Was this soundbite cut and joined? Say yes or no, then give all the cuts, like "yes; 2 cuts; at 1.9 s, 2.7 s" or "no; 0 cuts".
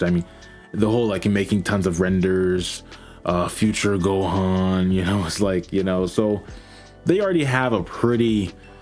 no; 0 cuts